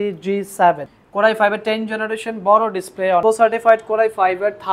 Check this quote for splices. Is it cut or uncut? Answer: cut